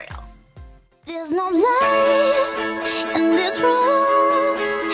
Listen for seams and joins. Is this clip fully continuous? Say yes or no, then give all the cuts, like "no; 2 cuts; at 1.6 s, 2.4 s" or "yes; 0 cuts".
yes; 0 cuts